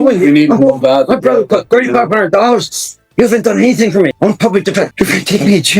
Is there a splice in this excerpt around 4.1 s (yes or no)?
yes